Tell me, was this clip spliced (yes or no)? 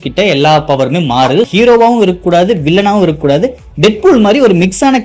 yes